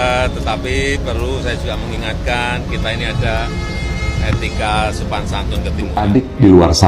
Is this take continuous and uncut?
no; 1 cut; at 6.0 s

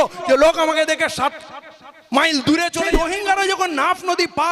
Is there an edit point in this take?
yes; 1 cut; at 2.9 s

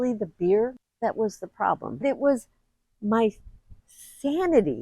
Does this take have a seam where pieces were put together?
yes; 2 cuts; at 0.8 s, 2.0 s

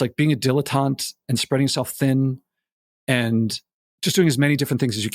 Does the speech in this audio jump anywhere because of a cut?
yes; 1 cut; at 3.8 s

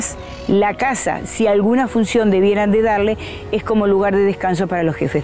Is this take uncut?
yes; 0 cuts

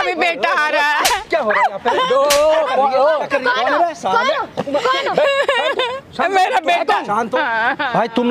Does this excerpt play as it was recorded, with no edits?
no; 1 cut; at 7.3 s

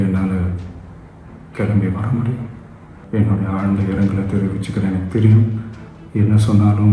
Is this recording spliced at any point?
yes; 1 cut; at 2.9 s

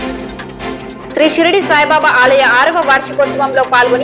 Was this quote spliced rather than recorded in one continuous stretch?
no; 0 cuts

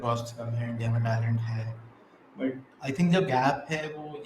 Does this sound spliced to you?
no; 0 cuts

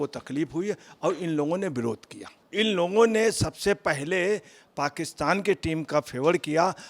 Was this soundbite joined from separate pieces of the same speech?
yes; 1 cut; at 2.4 s

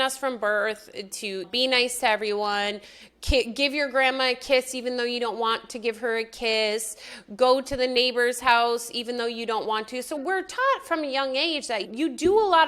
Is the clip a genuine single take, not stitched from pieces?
yes; 0 cuts

